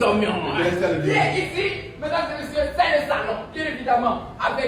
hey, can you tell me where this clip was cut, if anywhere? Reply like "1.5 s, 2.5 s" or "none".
none